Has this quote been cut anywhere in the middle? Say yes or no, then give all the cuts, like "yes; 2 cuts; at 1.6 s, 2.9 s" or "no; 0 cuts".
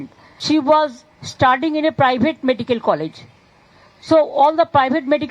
yes; 1 cut; at 1.9 s